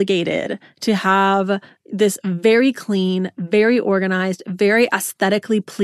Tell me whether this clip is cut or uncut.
uncut